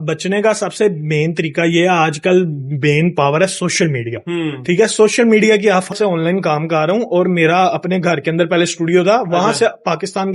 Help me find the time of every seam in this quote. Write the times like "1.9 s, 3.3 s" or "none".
5.9 s